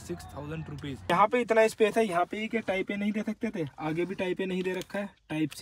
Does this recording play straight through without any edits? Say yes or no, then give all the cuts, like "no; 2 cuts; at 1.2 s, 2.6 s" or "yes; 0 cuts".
no; 1 cut; at 1.1 s